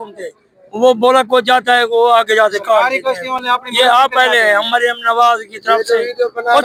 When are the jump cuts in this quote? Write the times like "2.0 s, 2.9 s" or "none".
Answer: none